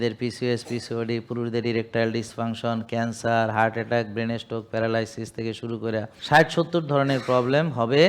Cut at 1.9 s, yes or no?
no